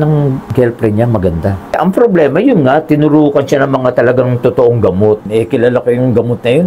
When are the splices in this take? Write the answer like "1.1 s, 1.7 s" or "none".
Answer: 1.6 s, 5.3 s